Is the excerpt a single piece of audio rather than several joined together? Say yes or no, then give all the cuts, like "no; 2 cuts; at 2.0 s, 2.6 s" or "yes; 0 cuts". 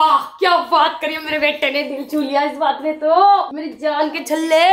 yes; 0 cuts